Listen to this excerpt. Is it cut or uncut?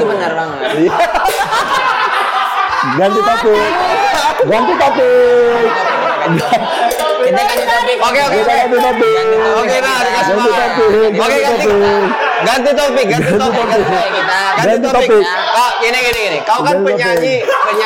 uncut